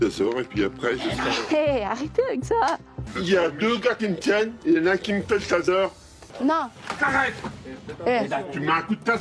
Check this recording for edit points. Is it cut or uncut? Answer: cut